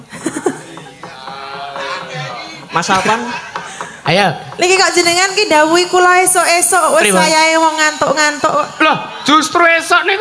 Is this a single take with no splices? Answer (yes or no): yes